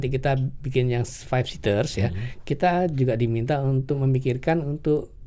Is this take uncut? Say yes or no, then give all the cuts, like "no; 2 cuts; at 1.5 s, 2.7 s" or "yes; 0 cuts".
yes; 0 cuts